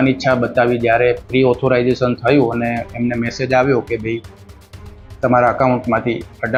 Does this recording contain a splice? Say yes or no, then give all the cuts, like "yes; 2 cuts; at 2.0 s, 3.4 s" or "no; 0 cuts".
no; 0 cuts